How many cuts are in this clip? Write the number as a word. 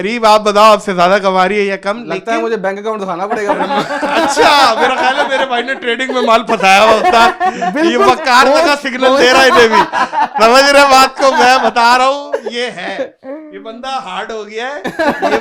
zero